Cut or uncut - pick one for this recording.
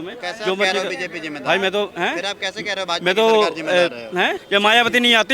cut